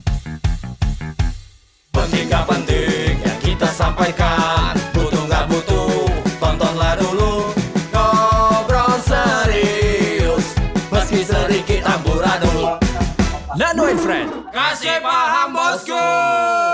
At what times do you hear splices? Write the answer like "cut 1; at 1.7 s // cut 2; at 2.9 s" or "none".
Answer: none